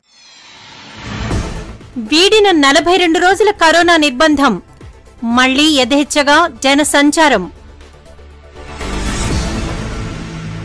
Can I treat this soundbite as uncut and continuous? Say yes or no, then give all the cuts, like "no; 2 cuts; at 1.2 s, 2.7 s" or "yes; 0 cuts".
no; 1 cut; at 1.5 s